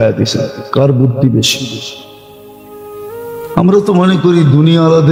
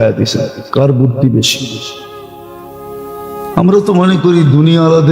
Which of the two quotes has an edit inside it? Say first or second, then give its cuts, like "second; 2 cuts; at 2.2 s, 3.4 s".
second; 2 cuts; at 2.1 s, 3.6 s